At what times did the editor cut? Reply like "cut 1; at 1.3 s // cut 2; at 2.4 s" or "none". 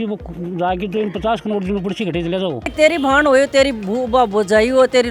cut 1; at 2.7 s